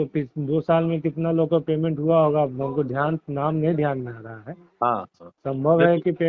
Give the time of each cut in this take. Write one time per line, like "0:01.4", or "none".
none